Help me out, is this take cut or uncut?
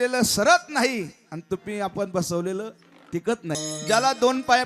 cut